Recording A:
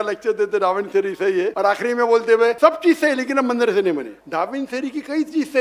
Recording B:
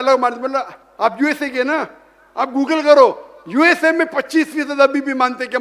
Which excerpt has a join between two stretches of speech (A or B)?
A